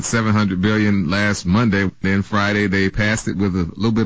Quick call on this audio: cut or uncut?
cut